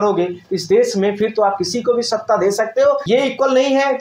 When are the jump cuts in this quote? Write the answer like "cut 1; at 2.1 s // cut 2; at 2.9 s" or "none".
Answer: cut 1; at 3.0 s

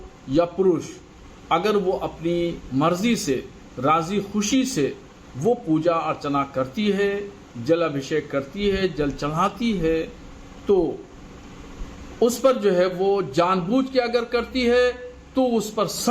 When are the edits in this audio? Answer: cut 1; at 12.9 s

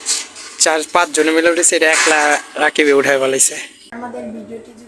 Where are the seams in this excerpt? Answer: cut 1; at 3.9 s

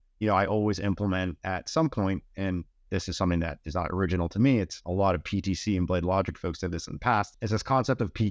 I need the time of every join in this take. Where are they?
cut 1; at 4.8 s // cut 2; at 7.4 s

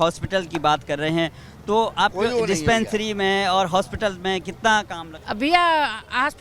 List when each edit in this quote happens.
cut 1; at 5.1 s

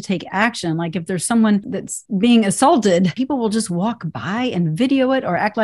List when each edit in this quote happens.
cut 1; at 1.8 s // cut 2; at 3.2 s

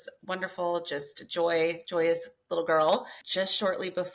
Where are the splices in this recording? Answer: cut 1; at 3.2 s

